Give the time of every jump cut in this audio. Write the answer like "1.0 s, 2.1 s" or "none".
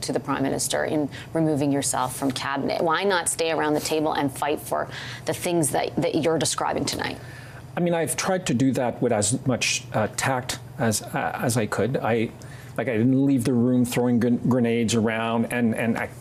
none